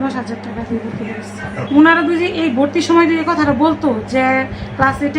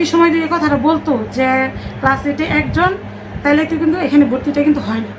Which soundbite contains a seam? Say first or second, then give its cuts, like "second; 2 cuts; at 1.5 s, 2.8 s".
first; 1 cut; at 1.6 s